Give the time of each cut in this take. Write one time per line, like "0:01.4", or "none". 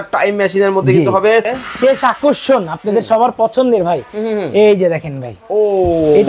0:01.5